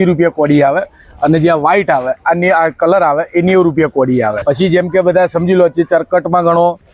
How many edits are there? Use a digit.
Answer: 0